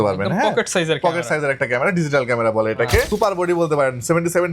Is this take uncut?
no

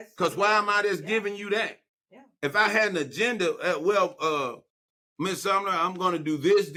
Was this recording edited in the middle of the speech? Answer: no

